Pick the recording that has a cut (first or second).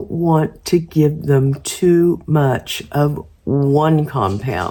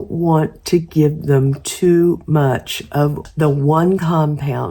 second